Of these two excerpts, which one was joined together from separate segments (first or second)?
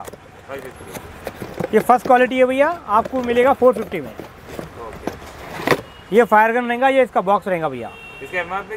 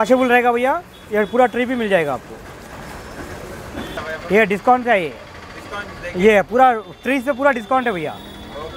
second